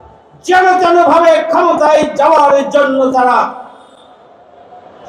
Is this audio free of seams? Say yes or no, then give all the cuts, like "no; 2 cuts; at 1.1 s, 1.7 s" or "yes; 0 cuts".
yes; 0 cuts